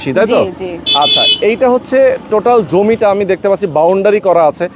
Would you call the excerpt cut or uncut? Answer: uncut